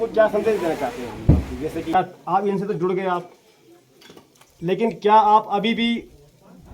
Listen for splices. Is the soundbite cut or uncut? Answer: cut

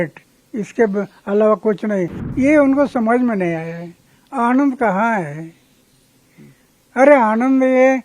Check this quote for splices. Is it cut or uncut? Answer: cut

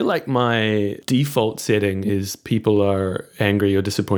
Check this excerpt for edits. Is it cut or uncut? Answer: cut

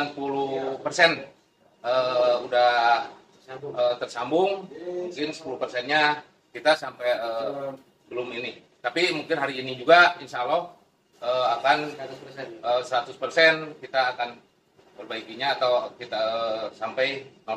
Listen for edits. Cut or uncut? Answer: uncut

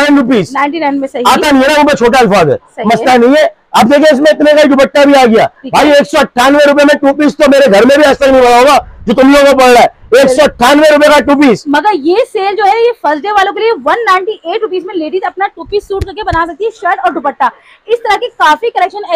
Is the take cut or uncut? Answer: uncut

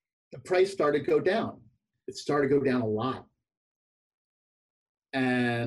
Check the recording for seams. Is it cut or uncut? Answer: uncut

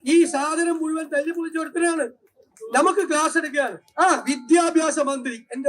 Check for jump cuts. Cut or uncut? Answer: cut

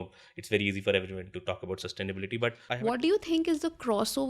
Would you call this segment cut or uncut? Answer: cut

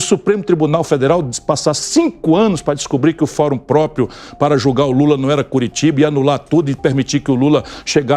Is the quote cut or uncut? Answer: uncut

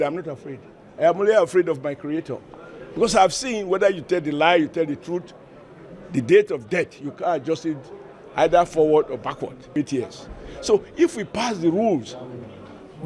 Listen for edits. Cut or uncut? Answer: cut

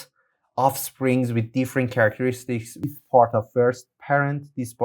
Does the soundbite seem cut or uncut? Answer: cut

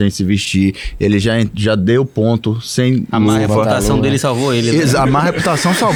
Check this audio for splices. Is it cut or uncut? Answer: uncut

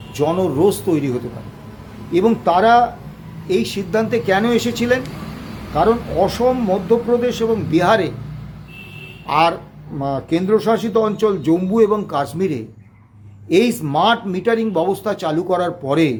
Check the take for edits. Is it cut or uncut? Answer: uncut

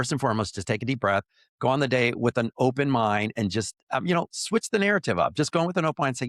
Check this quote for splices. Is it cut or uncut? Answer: uncut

